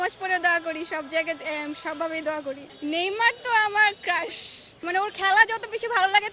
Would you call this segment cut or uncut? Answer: cut